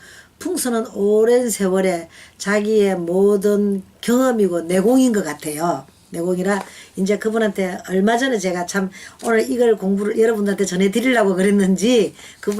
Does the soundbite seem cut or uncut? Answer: cut